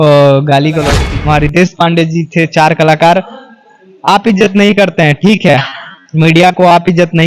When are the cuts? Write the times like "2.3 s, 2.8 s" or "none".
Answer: 1.1 s